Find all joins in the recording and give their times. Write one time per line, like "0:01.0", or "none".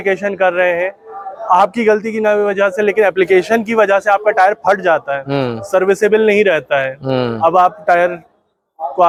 none